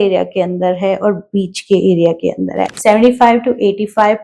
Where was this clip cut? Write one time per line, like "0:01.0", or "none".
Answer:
0:02.6